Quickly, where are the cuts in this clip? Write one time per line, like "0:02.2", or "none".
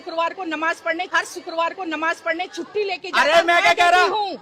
none